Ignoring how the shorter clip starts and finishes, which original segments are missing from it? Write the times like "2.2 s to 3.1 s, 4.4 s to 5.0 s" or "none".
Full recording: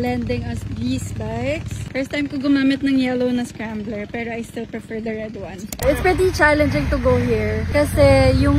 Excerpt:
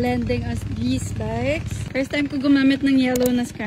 none